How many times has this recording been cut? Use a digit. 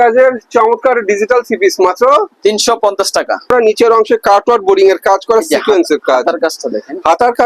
1